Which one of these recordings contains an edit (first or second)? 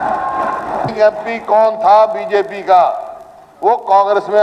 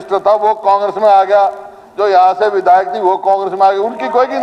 first